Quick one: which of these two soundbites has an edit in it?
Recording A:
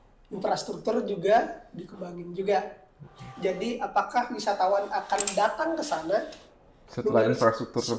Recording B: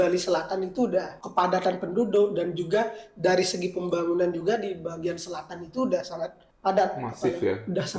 B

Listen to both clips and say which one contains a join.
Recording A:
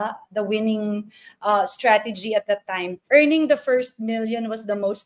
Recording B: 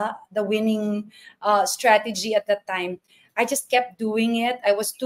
A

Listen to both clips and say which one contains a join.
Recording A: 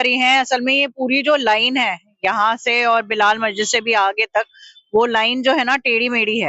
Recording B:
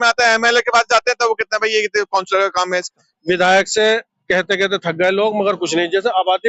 B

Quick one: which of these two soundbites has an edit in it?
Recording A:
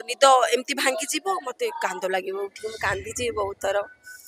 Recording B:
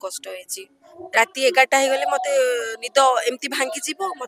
B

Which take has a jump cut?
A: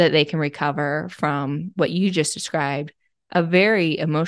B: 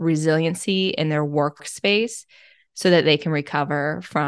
B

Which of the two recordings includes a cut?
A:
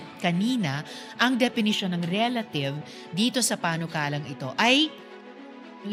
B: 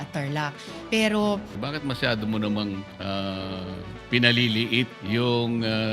B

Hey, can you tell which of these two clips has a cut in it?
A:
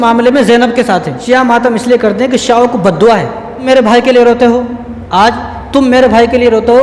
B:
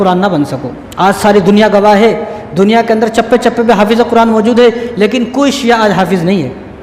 A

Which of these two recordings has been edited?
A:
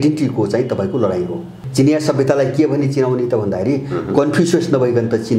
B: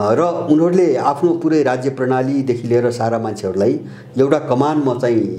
A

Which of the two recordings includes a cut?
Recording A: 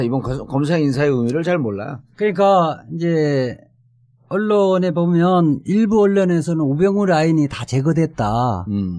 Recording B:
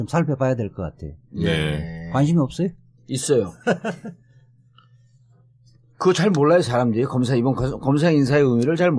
B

